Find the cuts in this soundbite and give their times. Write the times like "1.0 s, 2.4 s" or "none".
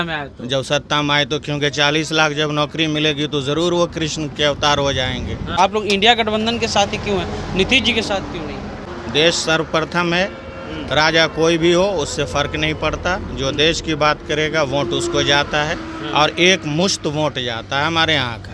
5.6 s, 8.8 s